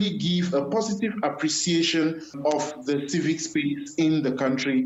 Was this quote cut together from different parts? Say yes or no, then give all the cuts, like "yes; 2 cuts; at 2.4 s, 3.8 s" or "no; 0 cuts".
no; 0 cuts